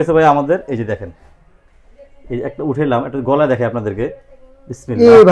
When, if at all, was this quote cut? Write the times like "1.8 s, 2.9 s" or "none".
none